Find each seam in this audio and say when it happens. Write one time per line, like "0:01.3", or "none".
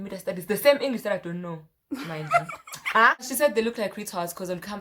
0:03.3